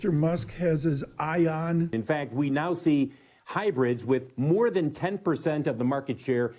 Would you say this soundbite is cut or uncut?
cut